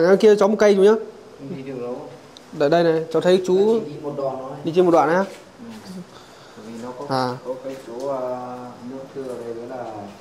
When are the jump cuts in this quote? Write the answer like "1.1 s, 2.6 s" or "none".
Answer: none